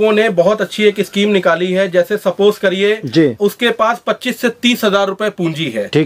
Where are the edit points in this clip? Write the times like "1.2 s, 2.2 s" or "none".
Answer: none